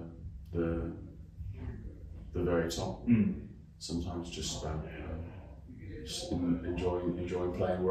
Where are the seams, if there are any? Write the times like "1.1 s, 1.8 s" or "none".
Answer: none